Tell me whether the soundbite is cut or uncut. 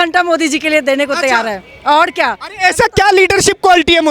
uncut